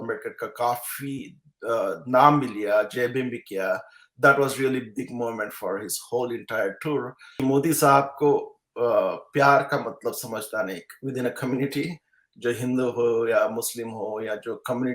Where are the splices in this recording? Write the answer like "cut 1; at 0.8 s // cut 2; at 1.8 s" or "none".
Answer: cut 1; at 7.2 s